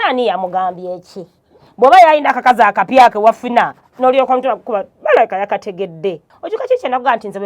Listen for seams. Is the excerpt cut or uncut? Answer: cut